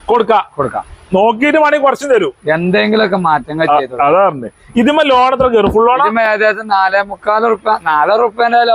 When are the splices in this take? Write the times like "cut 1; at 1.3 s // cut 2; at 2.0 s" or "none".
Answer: none